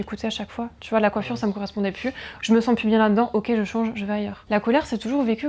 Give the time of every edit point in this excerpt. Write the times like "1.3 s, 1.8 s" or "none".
4.4 s